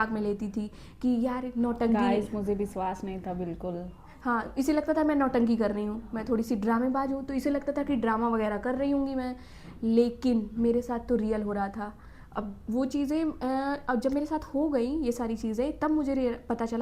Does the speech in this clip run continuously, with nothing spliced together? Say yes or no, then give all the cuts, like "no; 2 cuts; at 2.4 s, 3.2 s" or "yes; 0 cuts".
yes; 0 cuts